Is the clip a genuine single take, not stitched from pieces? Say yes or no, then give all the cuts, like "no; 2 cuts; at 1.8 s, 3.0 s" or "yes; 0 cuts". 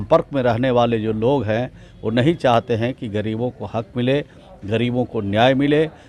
yes; 0 cuts